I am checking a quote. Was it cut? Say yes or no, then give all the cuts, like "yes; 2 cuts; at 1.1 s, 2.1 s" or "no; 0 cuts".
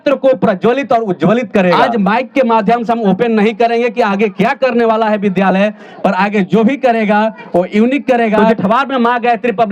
yes; 2 cuts; at 1.8 s, 8.5 s